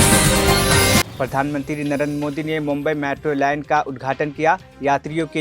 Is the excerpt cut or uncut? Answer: cut